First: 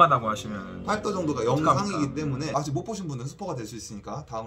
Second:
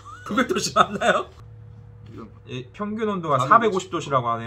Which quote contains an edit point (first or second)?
first